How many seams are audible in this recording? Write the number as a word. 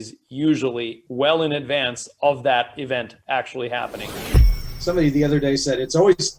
one